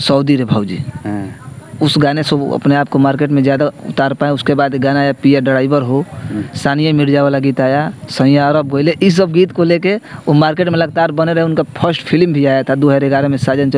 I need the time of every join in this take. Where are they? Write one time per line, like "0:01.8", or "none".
none